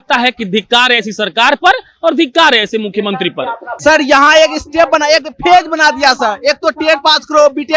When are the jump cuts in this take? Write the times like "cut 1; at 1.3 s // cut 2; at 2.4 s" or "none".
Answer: cut 1; at 3.7 s